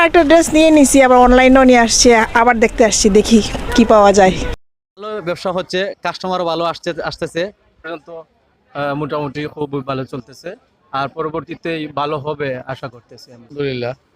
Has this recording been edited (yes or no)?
yes